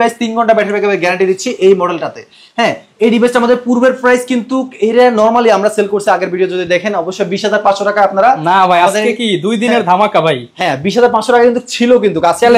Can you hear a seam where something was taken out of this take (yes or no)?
no